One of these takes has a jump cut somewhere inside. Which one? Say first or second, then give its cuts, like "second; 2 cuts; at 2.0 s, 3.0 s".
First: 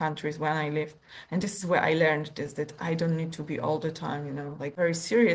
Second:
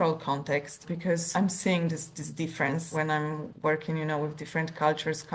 second; 2 cuts; at 1.3 s, 2.9 s